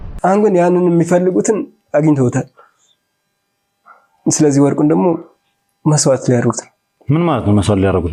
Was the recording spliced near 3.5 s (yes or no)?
no